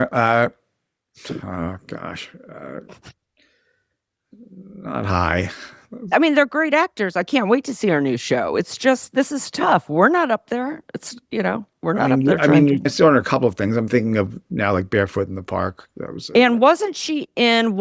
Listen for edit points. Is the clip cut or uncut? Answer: uncut